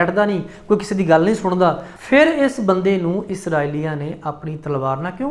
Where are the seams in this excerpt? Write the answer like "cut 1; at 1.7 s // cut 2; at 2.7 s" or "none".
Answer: cut 1; at 1.9 s